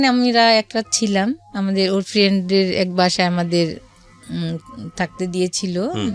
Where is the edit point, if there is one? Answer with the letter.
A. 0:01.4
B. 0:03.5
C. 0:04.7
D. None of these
D